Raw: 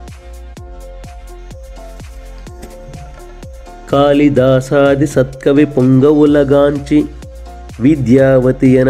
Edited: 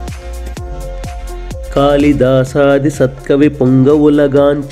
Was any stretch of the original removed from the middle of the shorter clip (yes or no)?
yes